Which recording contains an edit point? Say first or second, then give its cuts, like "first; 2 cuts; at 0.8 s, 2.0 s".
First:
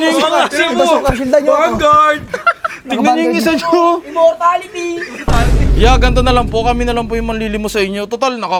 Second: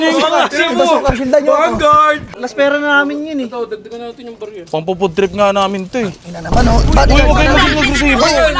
second; 1 cut; at 2.4 s